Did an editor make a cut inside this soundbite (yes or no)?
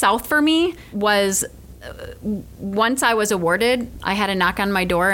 yes